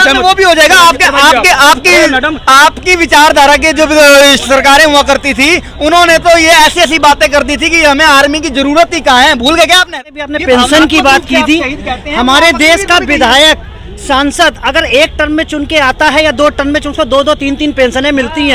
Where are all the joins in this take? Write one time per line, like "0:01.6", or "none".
0:09.9